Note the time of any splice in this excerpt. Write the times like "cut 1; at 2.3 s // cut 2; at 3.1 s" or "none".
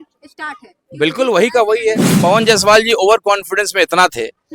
cut 1; at 2.1 s